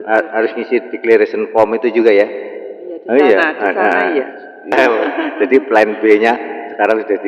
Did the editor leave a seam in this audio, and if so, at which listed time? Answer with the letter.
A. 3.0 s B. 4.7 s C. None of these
B